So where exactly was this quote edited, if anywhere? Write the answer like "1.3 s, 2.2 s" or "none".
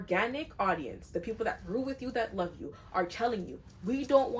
none